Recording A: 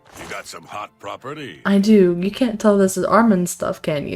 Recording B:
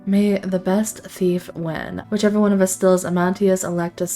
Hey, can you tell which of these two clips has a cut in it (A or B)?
B